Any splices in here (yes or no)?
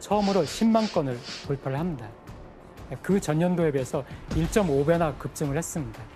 no